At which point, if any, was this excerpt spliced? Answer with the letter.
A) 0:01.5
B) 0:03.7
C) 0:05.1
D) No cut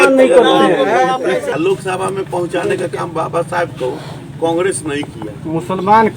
A